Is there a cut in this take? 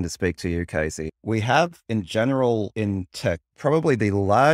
yes; 2 cuts; at 1.0 s, 3.4 s

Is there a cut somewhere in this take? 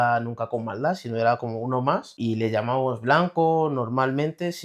yes; 1 cut; at 2.1 s

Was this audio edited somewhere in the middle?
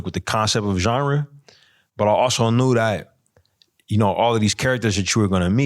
no; 0 cuts

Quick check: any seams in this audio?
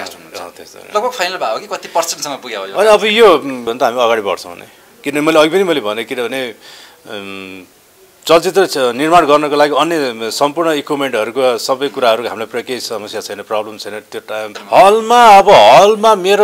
yes; 2 cuts; at 3.7 s, 14.6 s

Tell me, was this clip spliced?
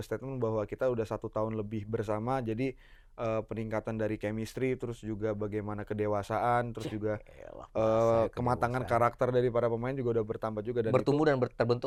no; 0 cuts

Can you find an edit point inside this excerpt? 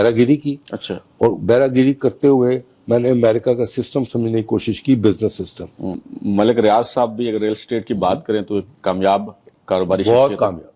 yes; 1 cut; at 6.0 s

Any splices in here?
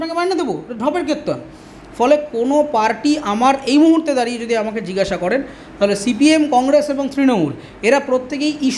no; 0 cuts

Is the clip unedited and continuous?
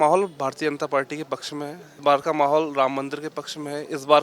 no; 1 cut; at 2.0 s

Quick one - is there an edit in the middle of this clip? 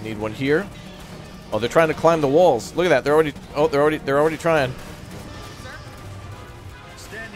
yes; 1 cut; at 5.3 s

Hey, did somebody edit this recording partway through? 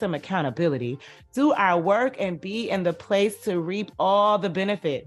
no; 0 cuts

